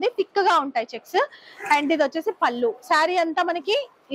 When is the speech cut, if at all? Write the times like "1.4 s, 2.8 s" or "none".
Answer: none

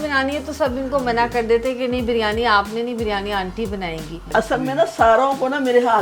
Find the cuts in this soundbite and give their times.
4.2 s

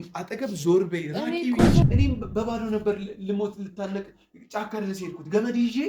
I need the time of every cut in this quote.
1.8 s

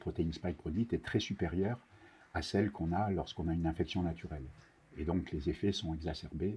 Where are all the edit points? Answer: none

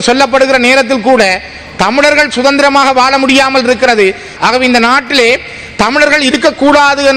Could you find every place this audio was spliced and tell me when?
4.3 s

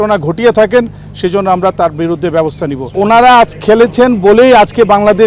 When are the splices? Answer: 2.9 s

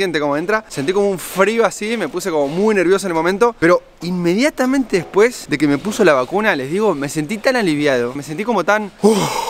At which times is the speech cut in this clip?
8.1 s

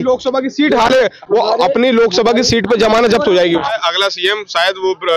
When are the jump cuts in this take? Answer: 3.7 s

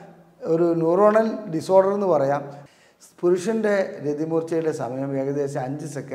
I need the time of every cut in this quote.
2.6 s

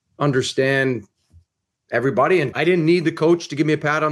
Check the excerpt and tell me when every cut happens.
2.5 s

